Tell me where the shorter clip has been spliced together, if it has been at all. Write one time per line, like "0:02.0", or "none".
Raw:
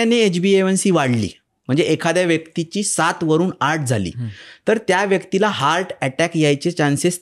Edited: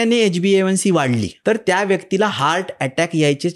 0:01.3